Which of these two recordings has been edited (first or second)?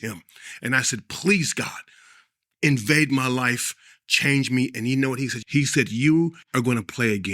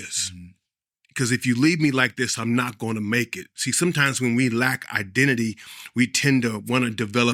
first